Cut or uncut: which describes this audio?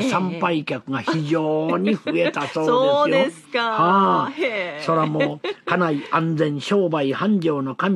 cut